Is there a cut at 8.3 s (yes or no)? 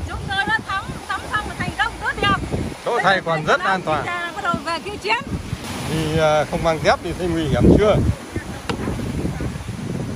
no